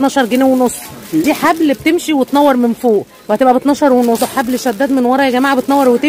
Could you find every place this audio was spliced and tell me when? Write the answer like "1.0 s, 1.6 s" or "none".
1.2 s, 4.2 s